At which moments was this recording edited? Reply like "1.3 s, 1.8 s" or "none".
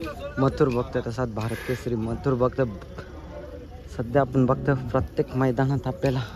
none